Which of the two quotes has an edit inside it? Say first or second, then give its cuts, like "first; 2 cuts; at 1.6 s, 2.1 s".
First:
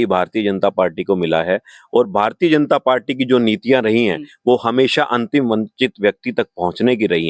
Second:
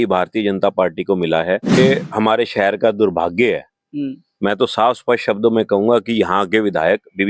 second; 1 cut; at 1.8 s